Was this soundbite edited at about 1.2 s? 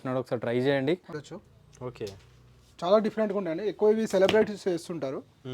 yes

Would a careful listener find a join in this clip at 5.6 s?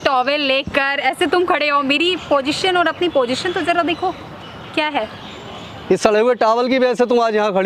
no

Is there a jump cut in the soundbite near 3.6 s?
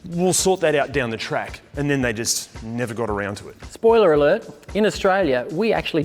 yes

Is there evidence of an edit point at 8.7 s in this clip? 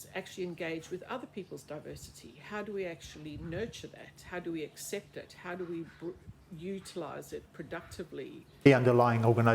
yes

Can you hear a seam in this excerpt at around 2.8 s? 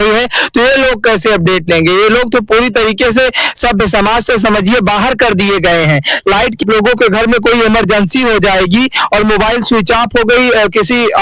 no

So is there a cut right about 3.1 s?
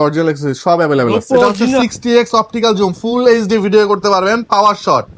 no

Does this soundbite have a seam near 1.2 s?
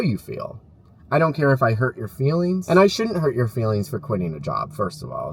no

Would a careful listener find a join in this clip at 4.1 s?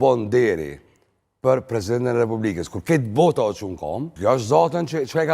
yes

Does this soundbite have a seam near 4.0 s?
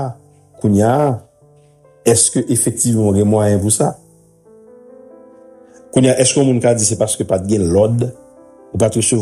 yes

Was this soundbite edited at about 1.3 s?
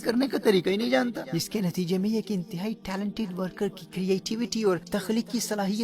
yes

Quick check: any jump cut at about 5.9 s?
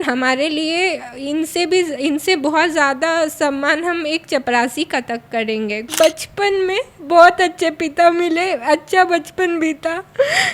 yes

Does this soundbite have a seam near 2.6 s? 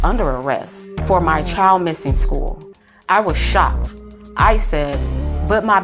yes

